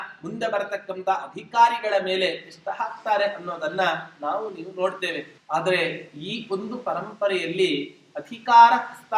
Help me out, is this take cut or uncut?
cut